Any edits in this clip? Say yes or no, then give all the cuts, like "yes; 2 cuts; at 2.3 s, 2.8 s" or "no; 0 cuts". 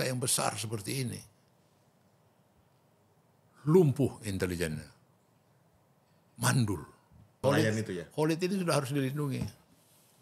yes; 1 cut; at 7.3 s